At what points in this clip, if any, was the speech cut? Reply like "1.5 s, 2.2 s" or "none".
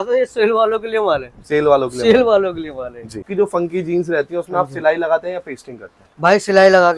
3.3 s

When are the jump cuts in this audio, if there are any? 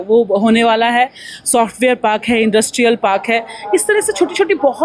none

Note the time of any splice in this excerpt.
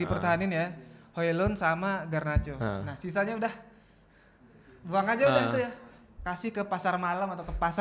none

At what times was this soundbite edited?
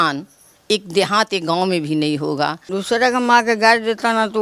2.6 s

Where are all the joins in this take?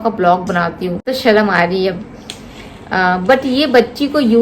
1.1 s

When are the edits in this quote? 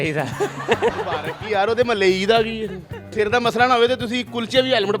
3.0 s

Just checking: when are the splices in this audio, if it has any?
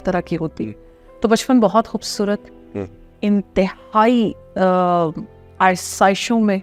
none

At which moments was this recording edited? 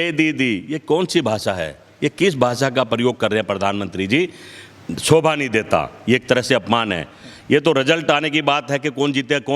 none

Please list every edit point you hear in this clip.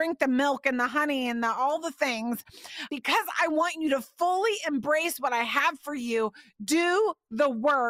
2.9 s

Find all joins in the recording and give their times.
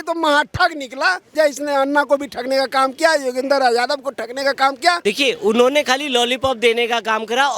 1.3 s, 5.0 s

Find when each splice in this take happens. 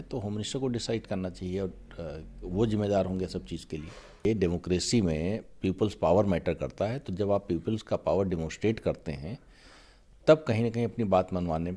4.2 s

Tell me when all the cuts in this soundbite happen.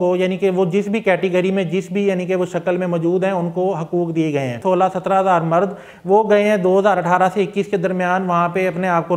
4.6 s

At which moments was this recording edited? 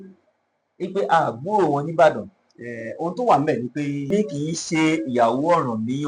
4.1 s

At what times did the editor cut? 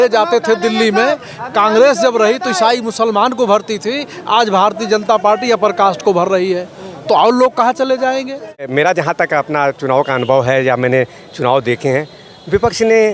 8.7 s

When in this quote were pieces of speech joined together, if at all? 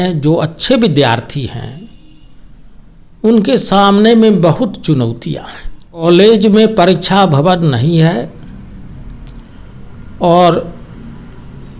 6.0 s

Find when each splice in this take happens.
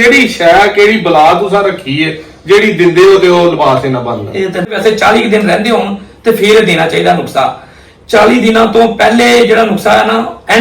4.7 s

